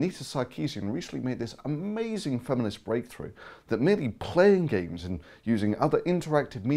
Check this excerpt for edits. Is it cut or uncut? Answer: uncut